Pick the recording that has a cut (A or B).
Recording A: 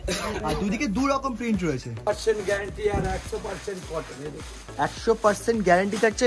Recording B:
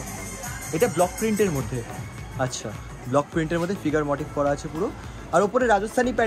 A